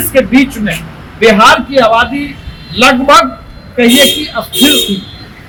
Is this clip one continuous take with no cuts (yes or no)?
yes